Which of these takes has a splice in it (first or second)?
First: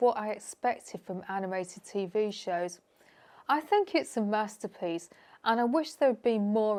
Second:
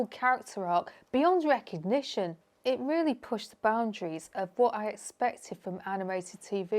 second